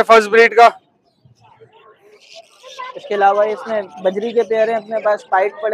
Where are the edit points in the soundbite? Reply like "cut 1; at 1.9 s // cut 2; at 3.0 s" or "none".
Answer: cut 1; at 1.9 s

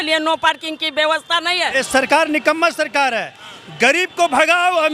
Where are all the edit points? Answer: cut 1; at 1.7 s

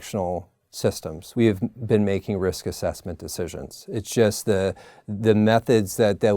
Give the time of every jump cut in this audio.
cut 1; at 1.1 s

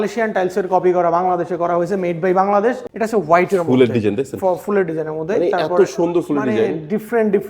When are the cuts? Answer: cut 1; at 2.8 s

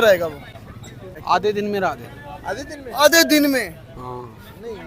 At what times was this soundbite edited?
cut 1; at 1.1 s

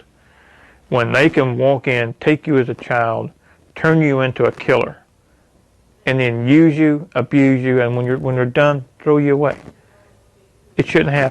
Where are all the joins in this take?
none

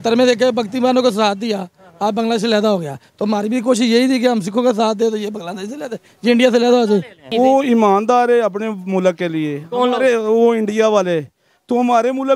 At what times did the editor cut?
cut 1; at 7.2 s

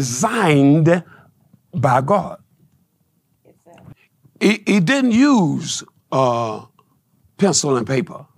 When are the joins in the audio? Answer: cut 1; at 3.9 s

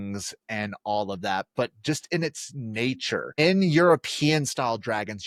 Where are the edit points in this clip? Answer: none

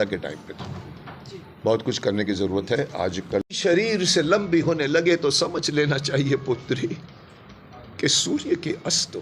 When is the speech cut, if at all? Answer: cut 1; at 3.5 s

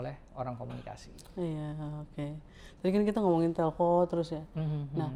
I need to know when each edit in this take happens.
none

